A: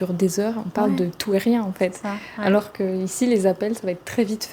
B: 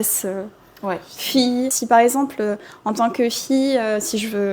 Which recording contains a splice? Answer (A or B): B